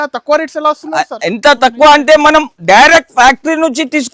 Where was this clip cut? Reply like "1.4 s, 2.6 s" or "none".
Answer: none

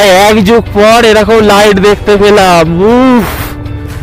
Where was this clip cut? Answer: none

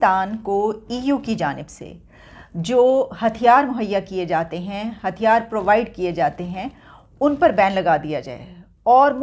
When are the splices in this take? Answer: none

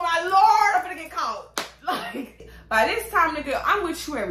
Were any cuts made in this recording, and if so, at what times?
2.5 s

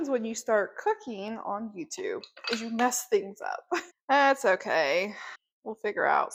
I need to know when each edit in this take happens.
none

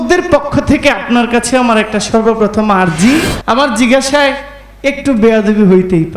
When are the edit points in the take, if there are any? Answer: 3.3 s

